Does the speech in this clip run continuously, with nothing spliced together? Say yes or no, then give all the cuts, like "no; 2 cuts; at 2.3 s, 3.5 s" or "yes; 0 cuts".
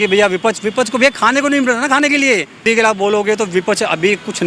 no; 1 cut; at 2.6 s